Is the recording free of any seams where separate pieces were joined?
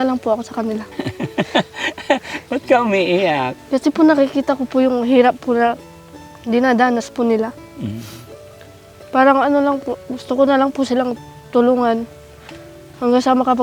no; 2 cuts; at 1.0 s, 3.6 s

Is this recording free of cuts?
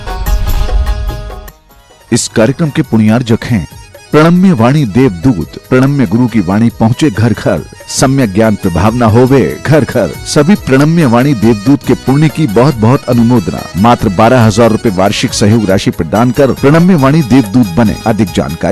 yes; 0 cuts

